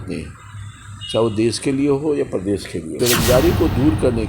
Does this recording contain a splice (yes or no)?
yes